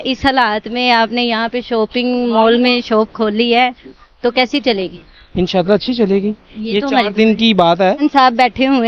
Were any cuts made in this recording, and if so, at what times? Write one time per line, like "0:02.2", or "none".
0:08.0